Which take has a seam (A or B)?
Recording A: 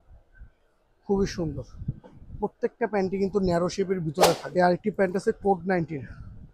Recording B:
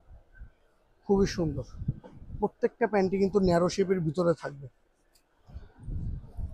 A